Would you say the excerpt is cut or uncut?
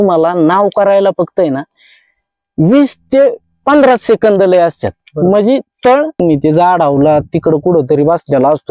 cut